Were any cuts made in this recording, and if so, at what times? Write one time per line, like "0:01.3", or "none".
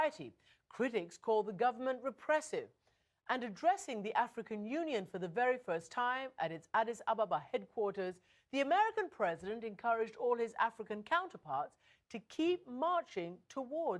0:04.6